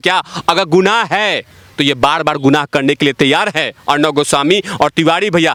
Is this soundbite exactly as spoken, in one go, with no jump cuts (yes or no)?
yes